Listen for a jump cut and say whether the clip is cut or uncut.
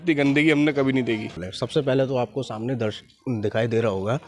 cut